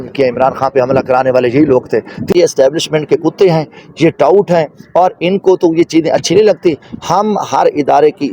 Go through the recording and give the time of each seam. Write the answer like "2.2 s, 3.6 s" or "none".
2.3 s